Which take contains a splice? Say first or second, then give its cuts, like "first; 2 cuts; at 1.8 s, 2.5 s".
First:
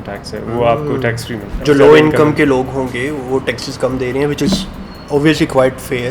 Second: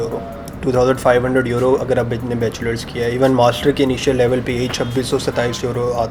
first; 1 cut; at 1.6 s